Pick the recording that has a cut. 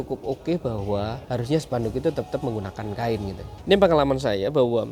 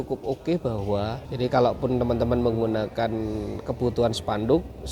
second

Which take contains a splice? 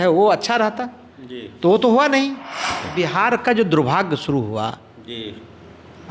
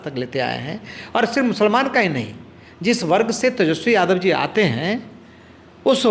first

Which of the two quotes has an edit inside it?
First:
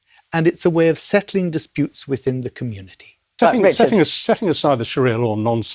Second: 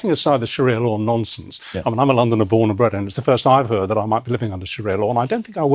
first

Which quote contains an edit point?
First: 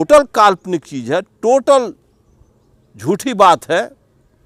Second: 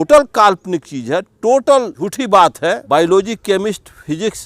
second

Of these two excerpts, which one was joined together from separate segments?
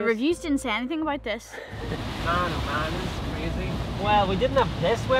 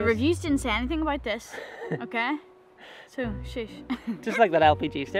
first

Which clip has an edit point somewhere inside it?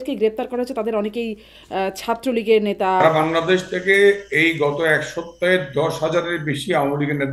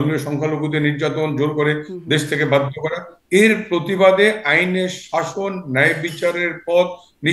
first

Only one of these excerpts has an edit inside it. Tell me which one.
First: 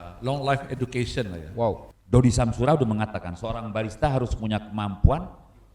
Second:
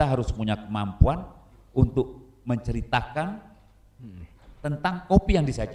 first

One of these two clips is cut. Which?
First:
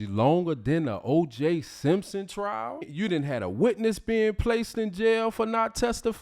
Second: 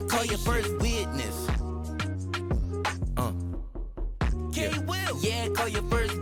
first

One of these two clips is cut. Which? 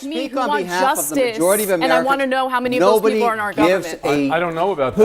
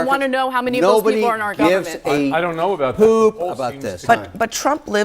second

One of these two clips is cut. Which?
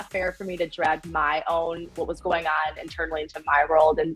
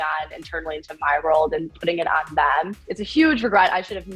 second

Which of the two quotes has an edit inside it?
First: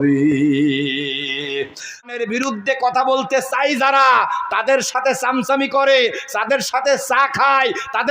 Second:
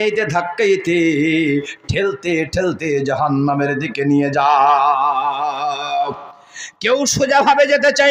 first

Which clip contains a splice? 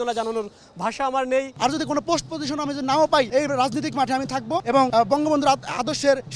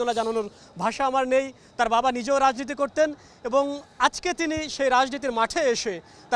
first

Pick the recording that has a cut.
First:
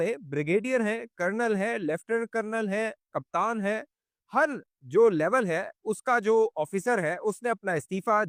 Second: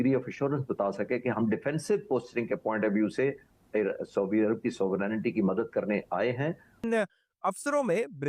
second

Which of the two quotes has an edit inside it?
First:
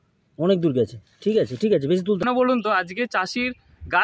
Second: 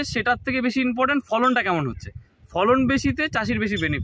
first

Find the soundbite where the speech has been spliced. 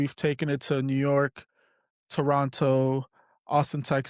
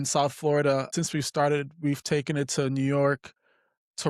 second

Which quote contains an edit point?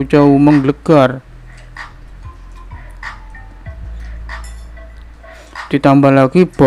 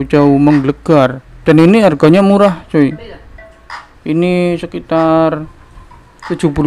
second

